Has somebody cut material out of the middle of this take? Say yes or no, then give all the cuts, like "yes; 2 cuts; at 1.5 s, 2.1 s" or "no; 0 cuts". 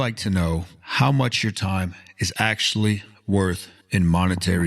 yes; 1 cut; at 3.7 s